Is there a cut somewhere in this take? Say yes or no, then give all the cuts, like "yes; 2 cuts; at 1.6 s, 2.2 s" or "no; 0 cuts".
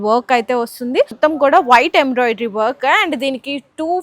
yes; 1 cut; at 1.1 s